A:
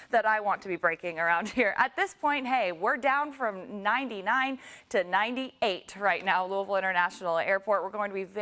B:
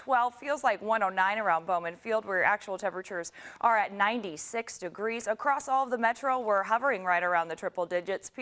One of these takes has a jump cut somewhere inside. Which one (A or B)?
B